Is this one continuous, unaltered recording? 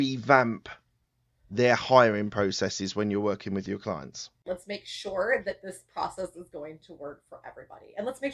no; 1 cut; at 4.4 s

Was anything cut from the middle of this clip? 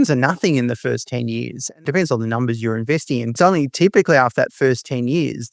yes; 2 cuts; at 1.8 s, 3.3 s

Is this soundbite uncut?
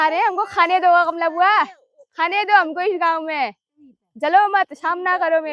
yes; 0 cuts

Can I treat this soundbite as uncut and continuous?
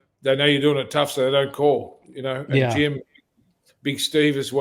yes; 0 cuts

